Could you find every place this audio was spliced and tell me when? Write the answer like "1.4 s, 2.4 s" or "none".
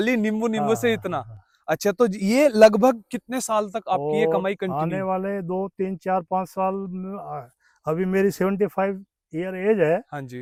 none